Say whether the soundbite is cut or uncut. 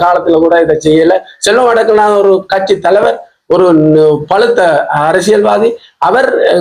uncut